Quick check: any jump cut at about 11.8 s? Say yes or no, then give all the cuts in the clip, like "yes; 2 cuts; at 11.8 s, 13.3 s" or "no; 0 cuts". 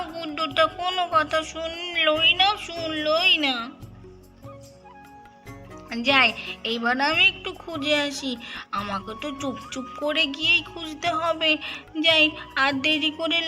yes; 1 cut; at 11.8 s